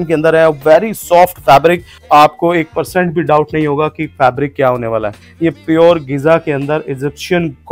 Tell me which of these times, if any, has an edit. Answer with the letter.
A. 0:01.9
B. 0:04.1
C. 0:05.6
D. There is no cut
A